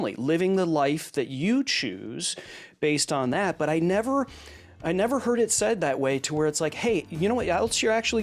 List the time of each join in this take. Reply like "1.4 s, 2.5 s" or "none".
none